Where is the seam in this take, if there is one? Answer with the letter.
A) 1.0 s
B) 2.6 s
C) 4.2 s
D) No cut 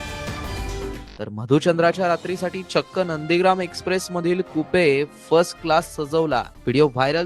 A